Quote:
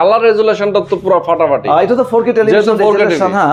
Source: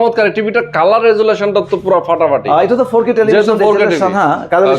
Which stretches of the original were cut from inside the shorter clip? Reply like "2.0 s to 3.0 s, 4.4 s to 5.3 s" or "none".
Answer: none